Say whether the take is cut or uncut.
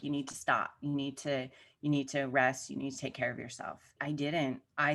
cut